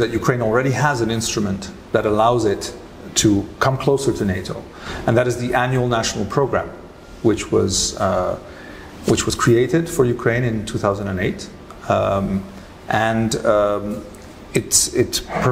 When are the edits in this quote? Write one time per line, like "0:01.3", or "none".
none